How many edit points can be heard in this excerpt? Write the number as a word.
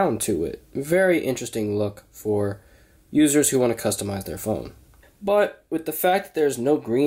one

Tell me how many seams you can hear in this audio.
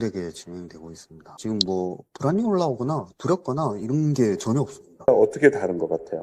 two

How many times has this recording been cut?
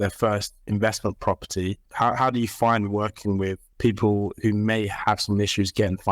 two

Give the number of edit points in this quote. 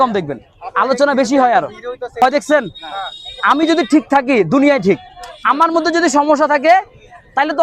one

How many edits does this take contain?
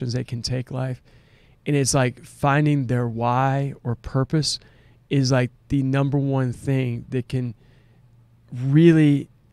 zero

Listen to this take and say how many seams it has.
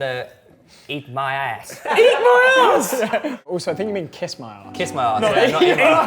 two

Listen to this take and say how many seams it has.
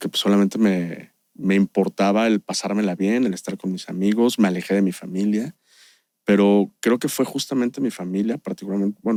zero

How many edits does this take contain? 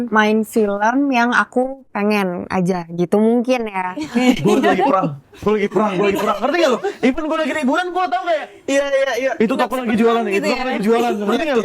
one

